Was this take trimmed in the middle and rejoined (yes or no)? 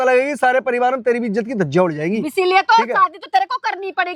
no